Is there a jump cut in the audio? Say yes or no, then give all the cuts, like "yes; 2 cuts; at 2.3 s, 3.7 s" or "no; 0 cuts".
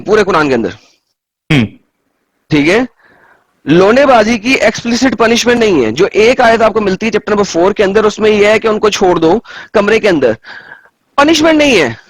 no; 0 cuts